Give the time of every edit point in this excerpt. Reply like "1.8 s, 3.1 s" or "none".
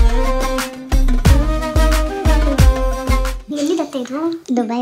3.5 s